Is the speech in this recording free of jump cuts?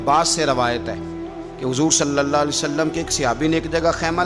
yes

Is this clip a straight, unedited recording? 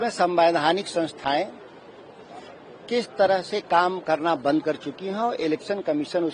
yes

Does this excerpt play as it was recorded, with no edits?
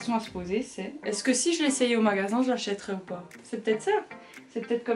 yes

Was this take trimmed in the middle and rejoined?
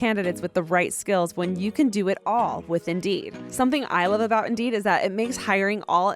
yes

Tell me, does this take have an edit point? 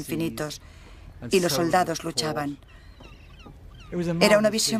no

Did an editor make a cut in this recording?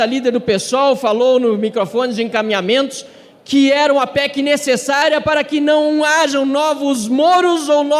no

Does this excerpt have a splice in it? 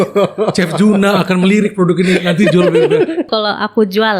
yes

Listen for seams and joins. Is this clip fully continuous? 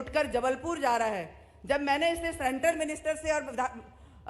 yes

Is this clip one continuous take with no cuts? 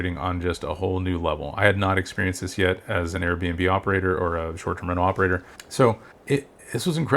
no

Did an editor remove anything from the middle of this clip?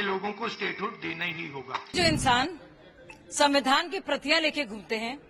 yes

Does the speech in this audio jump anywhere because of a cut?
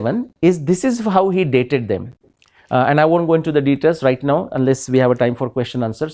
no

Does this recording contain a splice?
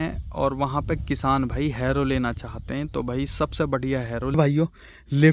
yes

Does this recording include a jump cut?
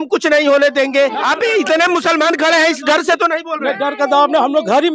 yes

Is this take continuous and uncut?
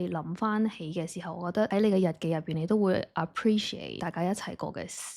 no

